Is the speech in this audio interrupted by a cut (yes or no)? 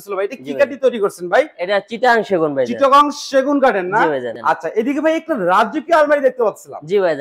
yes